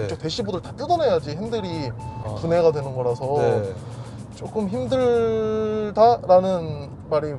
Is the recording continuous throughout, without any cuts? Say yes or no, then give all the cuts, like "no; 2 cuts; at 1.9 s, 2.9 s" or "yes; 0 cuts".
yes; 0 cuts